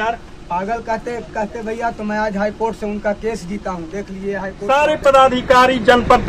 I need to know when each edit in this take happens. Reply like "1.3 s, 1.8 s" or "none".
4.5 s